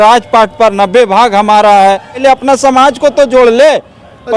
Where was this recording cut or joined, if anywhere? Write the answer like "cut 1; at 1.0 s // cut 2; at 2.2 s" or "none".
cut 1; at 2.2 s